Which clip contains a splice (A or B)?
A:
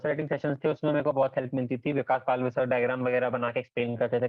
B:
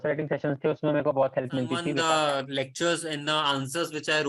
B